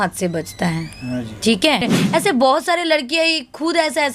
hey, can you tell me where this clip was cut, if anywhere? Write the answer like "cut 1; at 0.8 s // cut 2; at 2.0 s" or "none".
cut 1; at 1.9 s